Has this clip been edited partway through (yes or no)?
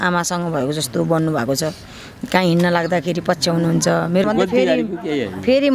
yes